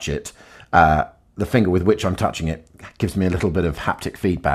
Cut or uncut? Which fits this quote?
uncut